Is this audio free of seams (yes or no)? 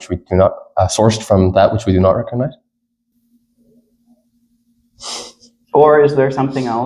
no